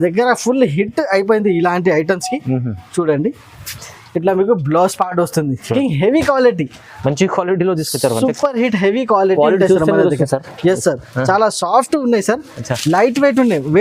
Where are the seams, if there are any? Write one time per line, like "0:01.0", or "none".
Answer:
0:05.7